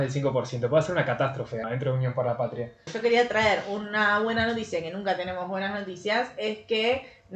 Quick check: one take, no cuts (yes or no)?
no